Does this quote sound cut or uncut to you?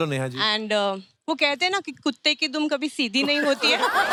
uncut